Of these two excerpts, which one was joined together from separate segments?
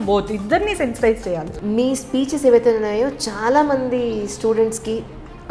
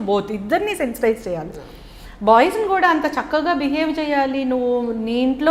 first; 1 cut; at 1.5 s

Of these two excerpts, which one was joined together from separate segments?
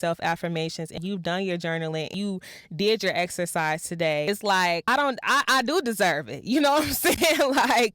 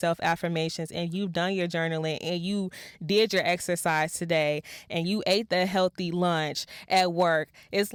first; 3 cuts; at 1.0 s, 2.1 s, 4.4 s

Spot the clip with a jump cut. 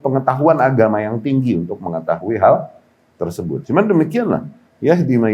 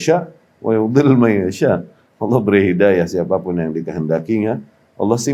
first; 1 cut; at 3.6 s

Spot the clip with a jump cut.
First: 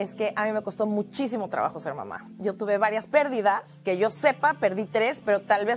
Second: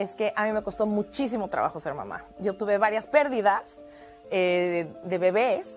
first; 1 cut; at 3.7 s

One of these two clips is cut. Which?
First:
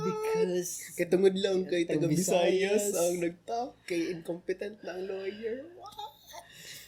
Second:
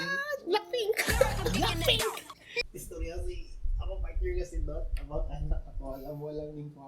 second; 1 cut; at 2.6 s

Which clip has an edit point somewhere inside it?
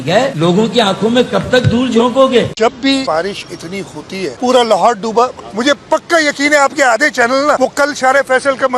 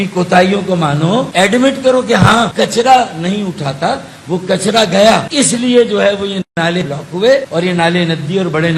first; 1 cut; at 2.5 s

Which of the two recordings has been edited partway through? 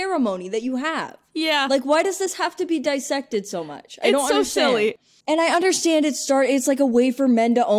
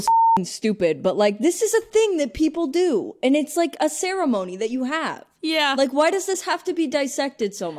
first; 1 cut; at 5.1 s

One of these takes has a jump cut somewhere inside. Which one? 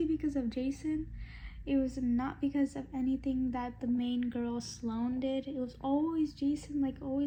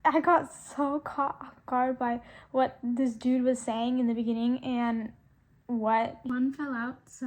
second; 1 cut; at 6.3 s

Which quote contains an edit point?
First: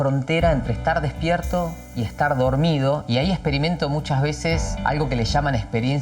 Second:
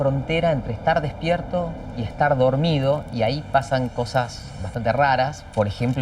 first; 2 cuts; at 3.0 s, 4.7 s

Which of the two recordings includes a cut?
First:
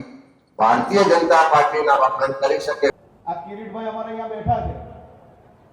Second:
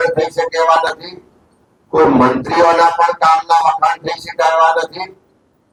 first; 1 cut; at 2.9 s

